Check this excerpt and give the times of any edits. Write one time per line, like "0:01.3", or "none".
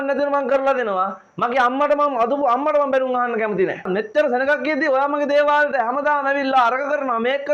0:03.8